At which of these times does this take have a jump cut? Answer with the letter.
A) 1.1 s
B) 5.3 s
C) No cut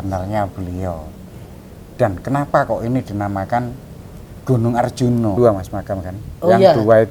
B